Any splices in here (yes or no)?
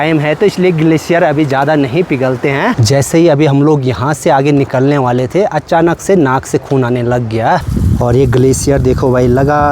yes